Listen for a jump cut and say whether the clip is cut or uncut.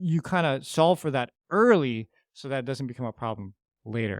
uncut